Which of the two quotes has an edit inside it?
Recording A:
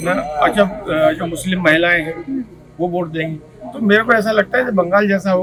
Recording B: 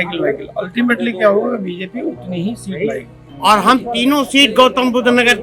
B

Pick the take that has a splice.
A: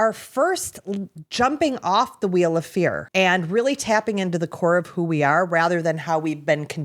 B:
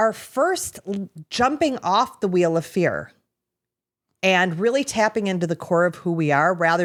A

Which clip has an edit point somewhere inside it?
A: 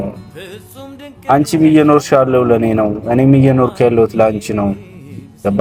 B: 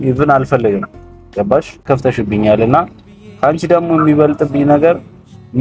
B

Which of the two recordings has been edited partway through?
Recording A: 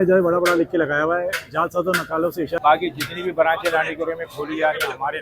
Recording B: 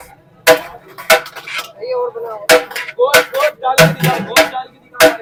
A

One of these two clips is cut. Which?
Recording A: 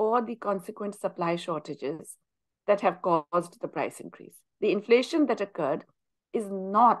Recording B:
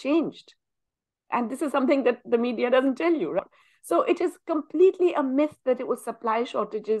B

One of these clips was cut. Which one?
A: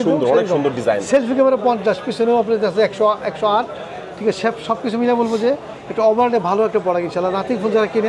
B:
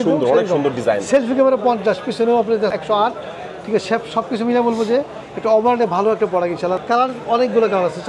B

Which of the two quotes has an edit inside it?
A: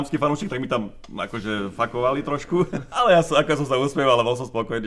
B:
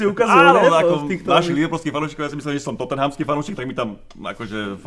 A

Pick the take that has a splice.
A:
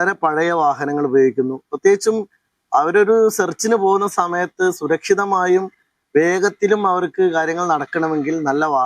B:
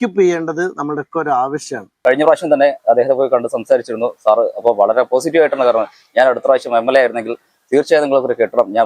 B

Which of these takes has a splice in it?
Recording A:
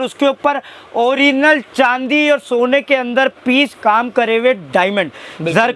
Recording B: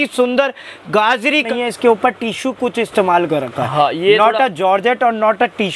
B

